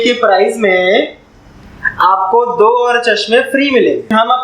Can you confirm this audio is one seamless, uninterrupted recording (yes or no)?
yes